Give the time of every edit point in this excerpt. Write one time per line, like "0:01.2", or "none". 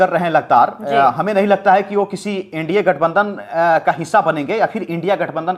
none